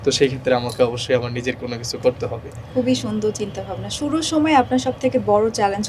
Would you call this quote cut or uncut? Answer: uncut